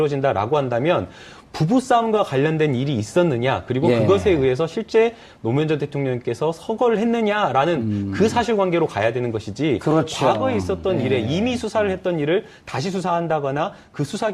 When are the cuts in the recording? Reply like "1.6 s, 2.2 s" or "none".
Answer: 2.7 s

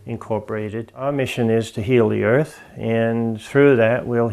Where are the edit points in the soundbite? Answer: 1.1 s

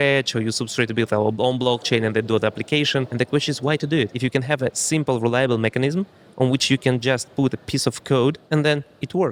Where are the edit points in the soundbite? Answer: 3.1 s, 4.1 s, 8.4 s

